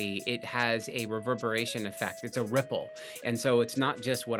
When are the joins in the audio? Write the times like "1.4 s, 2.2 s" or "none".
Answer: none